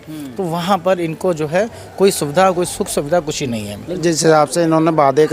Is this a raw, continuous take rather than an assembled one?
no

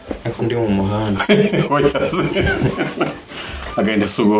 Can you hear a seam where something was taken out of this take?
no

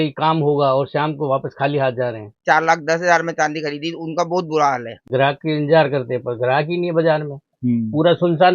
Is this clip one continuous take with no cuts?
no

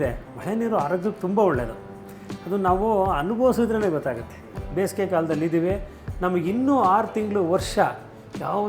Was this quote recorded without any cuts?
no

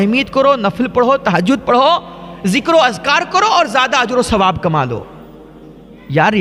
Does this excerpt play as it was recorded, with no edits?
yes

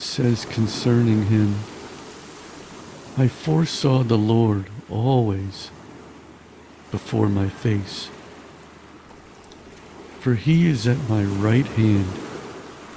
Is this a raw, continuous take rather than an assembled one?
yes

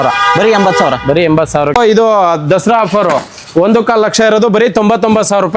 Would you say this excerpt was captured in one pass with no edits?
no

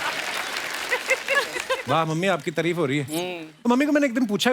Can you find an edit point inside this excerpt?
yes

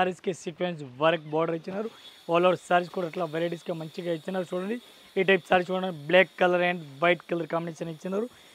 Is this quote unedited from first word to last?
yes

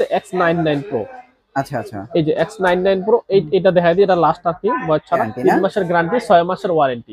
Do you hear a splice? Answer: yes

